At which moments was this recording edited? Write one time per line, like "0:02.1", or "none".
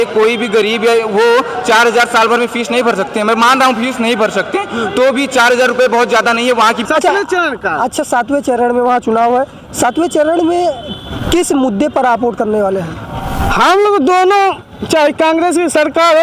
0:06.8